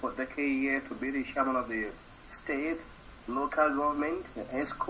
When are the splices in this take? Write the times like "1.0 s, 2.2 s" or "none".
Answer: none